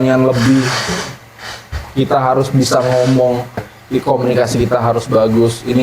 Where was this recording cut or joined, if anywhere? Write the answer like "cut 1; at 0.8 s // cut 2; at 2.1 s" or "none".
cut 1; at 3.7 s

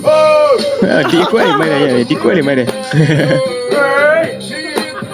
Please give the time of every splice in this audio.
none

